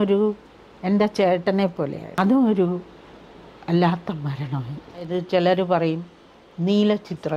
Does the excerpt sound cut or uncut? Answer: cut